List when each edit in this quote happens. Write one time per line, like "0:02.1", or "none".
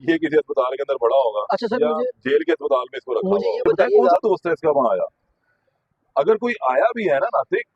0:04.2